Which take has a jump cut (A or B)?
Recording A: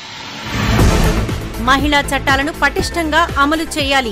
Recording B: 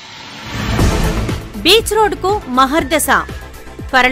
B